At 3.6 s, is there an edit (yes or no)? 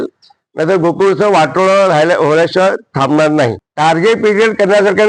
yes